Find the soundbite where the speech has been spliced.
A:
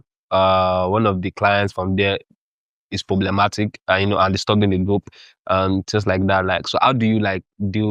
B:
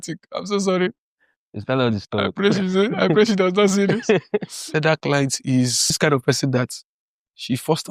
B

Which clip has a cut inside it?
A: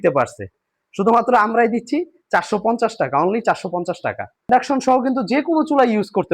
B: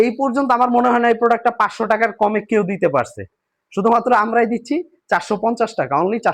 A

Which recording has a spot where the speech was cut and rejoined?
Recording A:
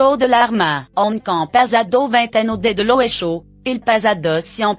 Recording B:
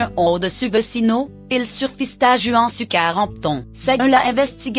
A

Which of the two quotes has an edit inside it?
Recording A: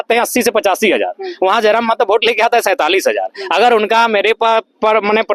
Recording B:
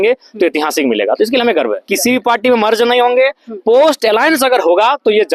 B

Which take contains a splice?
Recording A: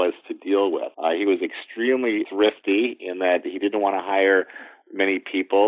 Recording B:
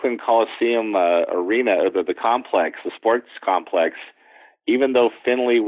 A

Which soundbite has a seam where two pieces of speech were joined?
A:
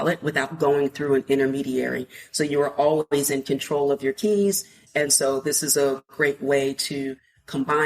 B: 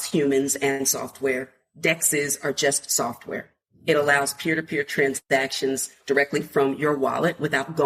A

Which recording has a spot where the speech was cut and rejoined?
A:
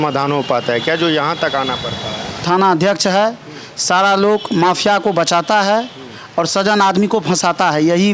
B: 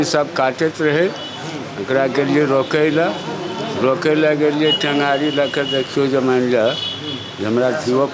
A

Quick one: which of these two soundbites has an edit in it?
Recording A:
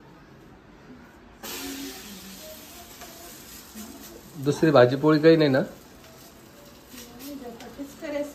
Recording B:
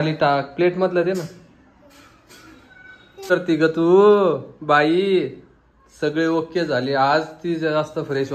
B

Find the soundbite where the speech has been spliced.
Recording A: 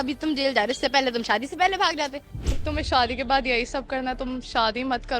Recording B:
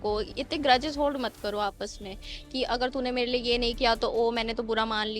A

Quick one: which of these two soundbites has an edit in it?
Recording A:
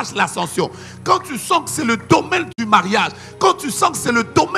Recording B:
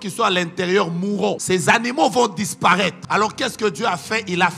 B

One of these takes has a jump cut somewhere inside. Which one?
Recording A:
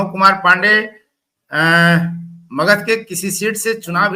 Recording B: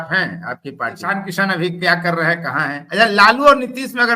B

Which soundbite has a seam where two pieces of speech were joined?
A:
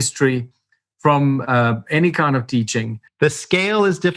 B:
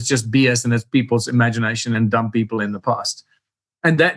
A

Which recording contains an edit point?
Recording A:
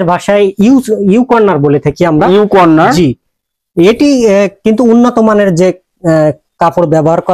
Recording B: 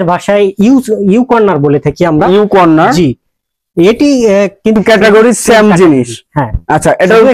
B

